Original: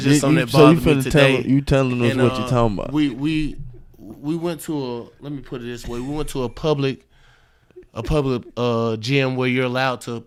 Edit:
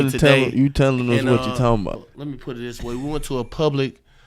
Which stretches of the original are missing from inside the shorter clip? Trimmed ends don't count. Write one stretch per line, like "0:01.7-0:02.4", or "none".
0:02.9-0:05.0